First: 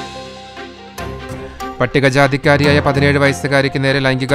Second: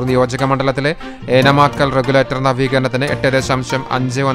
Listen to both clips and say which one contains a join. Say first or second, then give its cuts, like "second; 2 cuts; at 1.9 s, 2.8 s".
first; 1 cut; at 1.3 s